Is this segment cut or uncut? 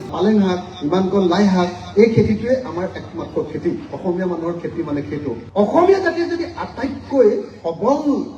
cut